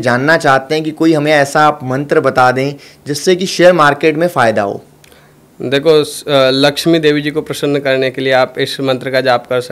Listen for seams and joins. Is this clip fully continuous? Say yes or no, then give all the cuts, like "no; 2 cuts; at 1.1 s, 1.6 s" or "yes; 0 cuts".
yes; 0 cuts